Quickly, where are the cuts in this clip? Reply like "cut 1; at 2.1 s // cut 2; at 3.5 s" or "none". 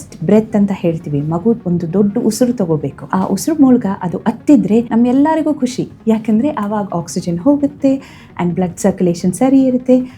cut 1; at 1.6 s // cut 2; at 3.0 s // cut 3; at 4.9 s